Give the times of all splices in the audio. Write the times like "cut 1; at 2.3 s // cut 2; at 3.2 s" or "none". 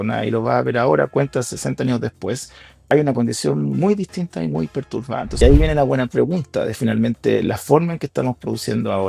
cut 1; at 1.1 s // cut 2; at 2.9 s // cut 3; at 5.4 s